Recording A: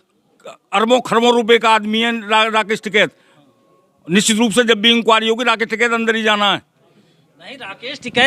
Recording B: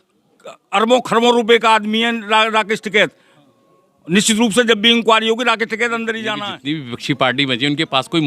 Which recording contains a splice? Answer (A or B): B